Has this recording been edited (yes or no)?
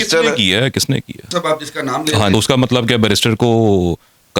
yes